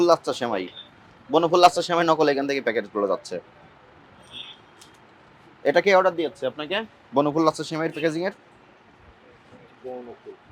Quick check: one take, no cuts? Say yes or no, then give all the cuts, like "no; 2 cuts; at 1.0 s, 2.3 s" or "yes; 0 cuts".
yes; 0 cuts